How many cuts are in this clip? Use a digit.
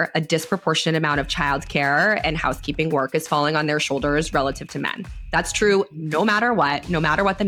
0